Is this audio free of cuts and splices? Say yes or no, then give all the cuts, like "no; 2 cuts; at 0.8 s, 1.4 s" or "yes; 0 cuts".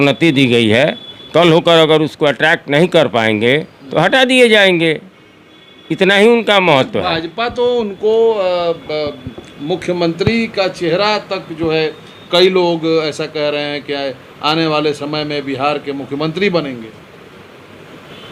yes; 0 cuts